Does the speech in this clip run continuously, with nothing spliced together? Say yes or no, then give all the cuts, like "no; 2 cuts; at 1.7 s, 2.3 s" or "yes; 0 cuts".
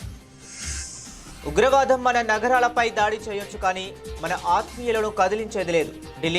no; 1 cut; at 1.4 s